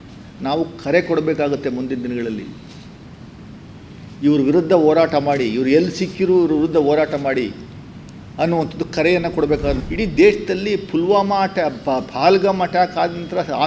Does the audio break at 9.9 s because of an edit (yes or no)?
yes